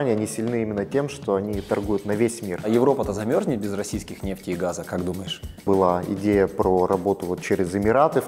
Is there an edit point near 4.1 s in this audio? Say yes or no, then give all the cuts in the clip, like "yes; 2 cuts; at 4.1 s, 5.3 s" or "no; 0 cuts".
no; 2 cuts; at 2.7 s, 5.6 s